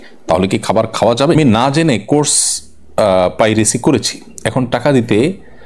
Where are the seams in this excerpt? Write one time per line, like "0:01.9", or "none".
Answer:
0:01.4

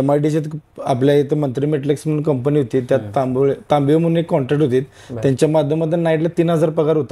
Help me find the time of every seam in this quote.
none

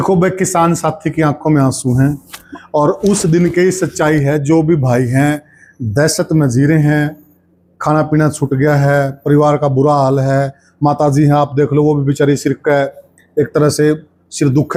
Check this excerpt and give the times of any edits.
none

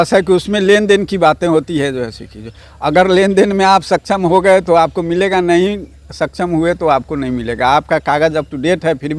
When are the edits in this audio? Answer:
none

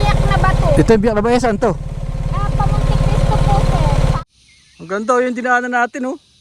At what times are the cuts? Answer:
0:04.2

